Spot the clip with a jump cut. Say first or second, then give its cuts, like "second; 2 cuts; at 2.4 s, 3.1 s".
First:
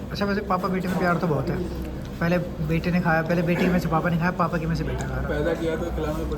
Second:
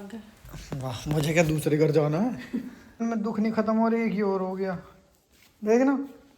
second; 1 cut; at 2.8 s